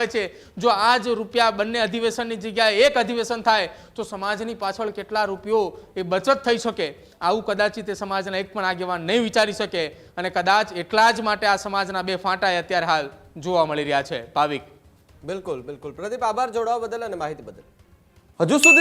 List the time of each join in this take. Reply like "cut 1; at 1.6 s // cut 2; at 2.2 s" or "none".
none